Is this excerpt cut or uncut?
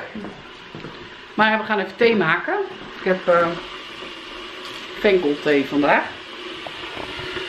uncut